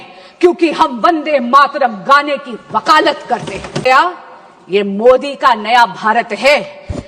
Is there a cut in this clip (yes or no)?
yes